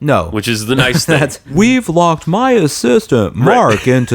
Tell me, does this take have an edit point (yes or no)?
yes